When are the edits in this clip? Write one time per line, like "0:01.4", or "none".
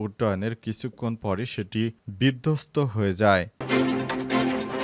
0:03.6